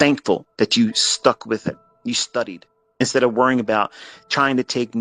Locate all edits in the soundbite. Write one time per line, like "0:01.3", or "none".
0:01.9
0:03.0